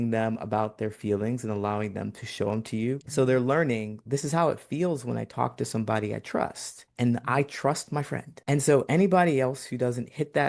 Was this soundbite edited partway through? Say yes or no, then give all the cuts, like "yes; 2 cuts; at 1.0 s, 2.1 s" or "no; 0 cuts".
yes; 1 cut; at 3.0 s